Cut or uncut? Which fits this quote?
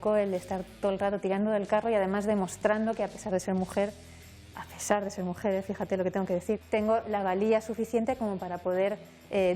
cut